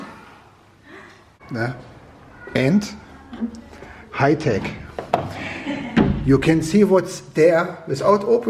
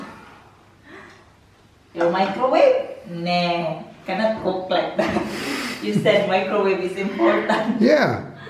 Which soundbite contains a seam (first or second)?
first